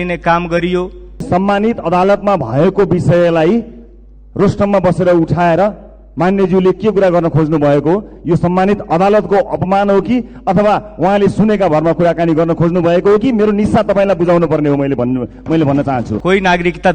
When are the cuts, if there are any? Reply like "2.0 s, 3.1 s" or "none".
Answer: 1.2 s, 16.1 s